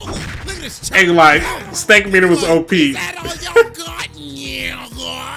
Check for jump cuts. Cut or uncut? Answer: uncut